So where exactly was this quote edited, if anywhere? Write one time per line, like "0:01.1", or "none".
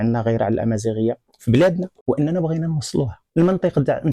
0:01.9
0:03.2